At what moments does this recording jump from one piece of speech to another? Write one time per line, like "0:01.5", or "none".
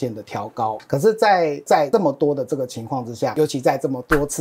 0:00.8
0:01.9
0:03.3